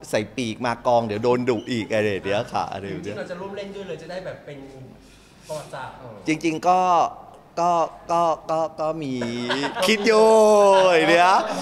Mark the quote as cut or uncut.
uncut